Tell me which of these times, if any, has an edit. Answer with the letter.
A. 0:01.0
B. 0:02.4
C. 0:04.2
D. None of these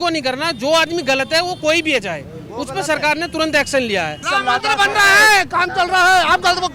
C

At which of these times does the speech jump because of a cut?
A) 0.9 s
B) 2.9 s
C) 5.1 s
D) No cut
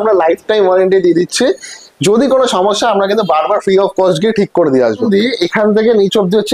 C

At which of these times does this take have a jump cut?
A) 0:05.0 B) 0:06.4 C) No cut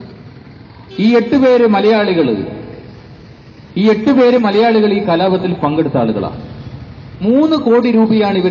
A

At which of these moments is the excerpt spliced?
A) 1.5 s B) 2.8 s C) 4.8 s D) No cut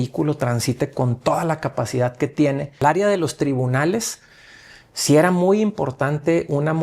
B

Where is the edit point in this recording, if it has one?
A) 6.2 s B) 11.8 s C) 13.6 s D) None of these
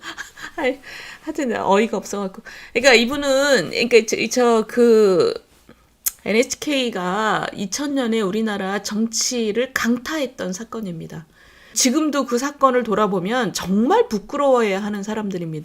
B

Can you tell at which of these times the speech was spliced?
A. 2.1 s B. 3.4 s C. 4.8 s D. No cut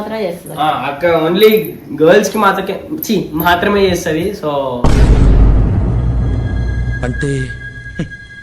D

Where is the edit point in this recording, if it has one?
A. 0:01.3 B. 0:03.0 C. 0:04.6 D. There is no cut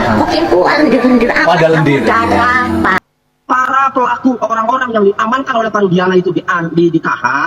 B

